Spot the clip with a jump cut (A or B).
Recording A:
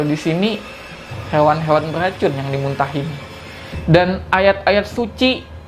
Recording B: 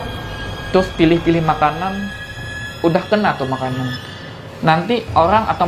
A